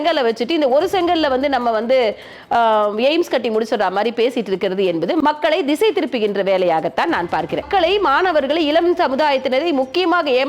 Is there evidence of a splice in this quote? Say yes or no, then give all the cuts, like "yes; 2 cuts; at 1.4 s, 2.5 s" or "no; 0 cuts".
yes; 2 cuts; at 5.2 s, 7.7 s